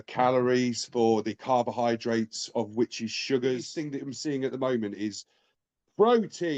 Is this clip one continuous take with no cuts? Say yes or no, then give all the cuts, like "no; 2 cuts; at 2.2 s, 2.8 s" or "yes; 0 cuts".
no; 1 cut; at 3.7 s